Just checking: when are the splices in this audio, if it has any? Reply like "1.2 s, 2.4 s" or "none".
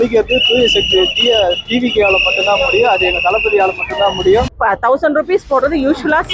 4.5 s